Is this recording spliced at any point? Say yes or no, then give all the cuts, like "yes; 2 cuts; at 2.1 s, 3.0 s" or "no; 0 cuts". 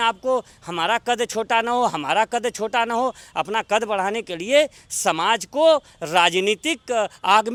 no; 0 cuts